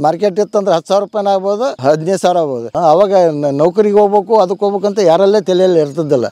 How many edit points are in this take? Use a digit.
2